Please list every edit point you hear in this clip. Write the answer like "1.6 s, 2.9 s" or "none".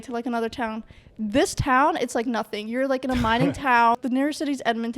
4.0 s